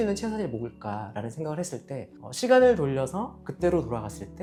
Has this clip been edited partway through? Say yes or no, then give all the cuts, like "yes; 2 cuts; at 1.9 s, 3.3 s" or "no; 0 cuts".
no; 0 cuts